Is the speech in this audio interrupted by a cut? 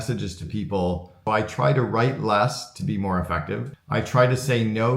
yes; 2 cuts; at 1.1 s, 3.8 s

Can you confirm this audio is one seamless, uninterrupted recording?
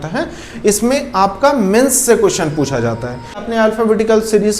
no; 1 cut; at 3.4 s

